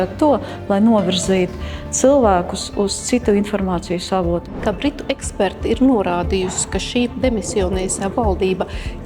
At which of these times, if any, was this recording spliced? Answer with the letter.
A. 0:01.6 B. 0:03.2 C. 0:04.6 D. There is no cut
C